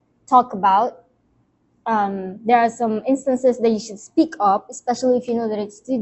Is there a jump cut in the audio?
no; 0 cuts

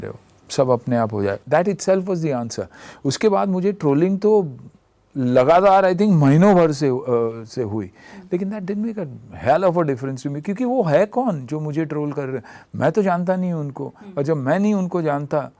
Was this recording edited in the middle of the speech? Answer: no; 0 cuts

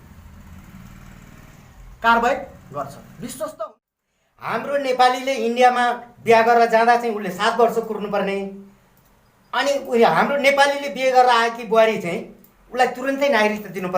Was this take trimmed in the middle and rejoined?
yes; 1 cut; at 3.7 s

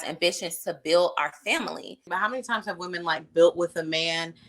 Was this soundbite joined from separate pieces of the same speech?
yes; 1 cut; at 2.0 s

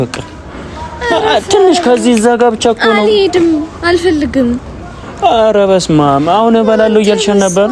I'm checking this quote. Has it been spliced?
no; 0 cuts

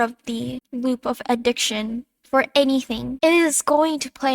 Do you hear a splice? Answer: yes; 1 cut; at 3.1 s

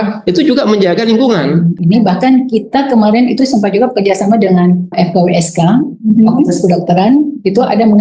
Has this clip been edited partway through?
yes; 1 cut; at 1.6 s

